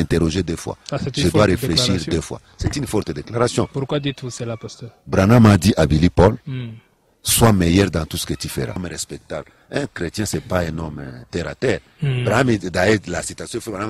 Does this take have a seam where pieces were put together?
yes; 1 cut; at 8.8 s

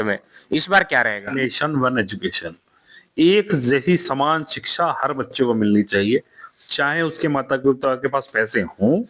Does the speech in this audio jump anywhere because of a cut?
yes; 1 cut; at 1.4 s

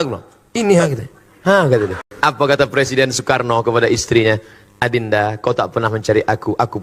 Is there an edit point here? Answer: yes; 1 cut; at 2.0 s

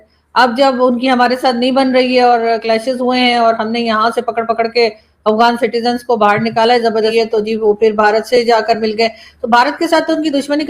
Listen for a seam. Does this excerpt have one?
yes; 1 cut; at 7.1 s

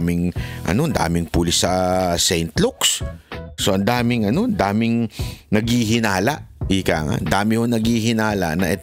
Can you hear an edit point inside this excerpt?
no; 0 cuts

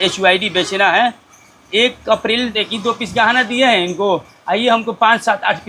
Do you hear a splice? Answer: yes; 1 cut; at 2.5 s

